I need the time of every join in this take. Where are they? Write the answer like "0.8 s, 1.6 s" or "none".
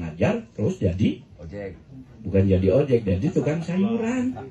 none